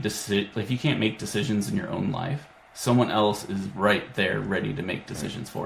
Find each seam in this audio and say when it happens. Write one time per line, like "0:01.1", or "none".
none